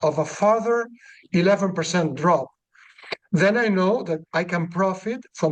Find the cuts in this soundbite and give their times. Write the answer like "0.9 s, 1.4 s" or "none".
none